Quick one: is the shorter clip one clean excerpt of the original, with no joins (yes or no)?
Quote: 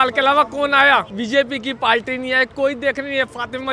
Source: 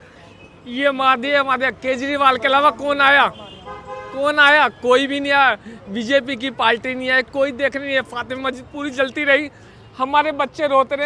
no